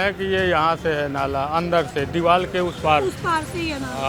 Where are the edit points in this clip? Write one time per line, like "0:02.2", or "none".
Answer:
none